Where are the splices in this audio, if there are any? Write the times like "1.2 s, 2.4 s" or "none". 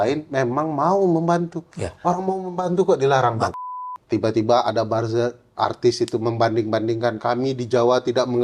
3.5 s